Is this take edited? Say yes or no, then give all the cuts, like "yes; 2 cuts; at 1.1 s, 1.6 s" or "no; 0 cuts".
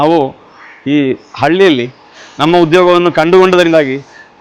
no; 0 cuts